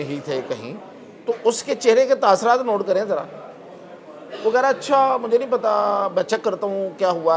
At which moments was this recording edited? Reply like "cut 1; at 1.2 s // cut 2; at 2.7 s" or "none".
none